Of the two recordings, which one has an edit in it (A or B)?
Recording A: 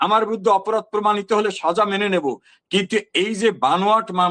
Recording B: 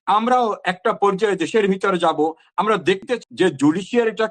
B